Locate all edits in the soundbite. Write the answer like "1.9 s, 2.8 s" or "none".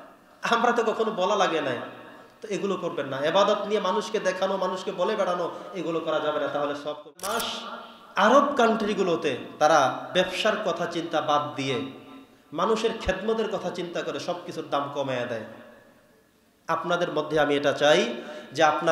7.4 s